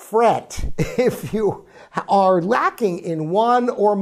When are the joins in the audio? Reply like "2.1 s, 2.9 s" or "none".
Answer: none